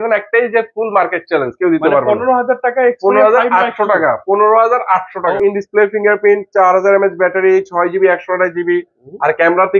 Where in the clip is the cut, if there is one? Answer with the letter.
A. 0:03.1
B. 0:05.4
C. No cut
B